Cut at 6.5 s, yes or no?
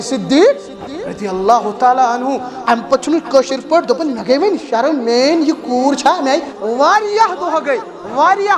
yes